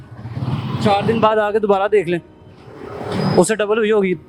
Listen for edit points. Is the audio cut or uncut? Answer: uncut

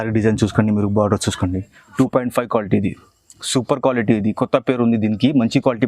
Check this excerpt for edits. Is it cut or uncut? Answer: cut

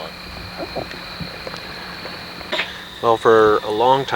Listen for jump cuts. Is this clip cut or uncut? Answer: cut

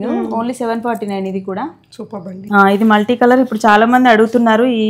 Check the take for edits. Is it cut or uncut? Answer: cut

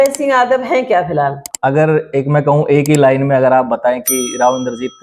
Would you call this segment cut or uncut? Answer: cut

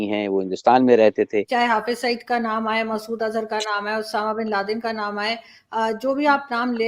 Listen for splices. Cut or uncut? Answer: cut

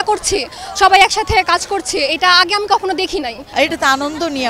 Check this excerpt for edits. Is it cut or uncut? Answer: cut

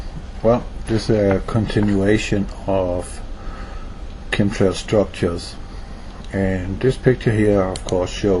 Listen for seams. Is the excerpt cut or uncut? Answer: uncut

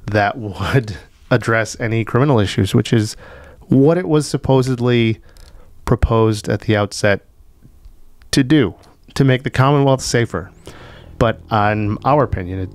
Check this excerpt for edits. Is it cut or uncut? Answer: uncut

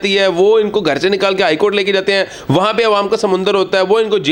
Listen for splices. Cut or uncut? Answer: uncut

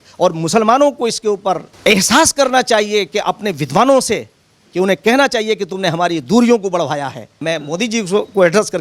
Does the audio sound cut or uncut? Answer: cut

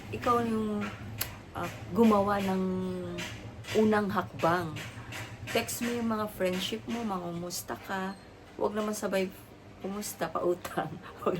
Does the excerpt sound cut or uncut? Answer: uncut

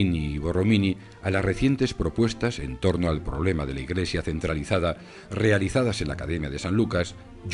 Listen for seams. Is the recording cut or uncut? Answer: cut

